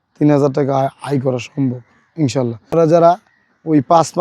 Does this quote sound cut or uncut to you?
cut